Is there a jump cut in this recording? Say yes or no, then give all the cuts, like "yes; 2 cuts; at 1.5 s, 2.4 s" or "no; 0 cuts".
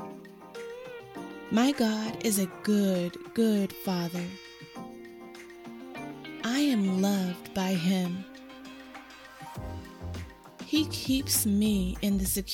no; 0 cuts